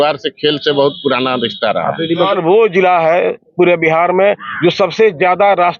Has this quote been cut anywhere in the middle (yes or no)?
yes